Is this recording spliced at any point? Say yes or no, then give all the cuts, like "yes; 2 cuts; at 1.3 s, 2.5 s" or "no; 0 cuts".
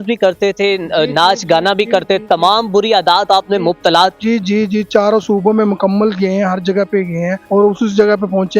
yes; 1 cut; at 7.4 s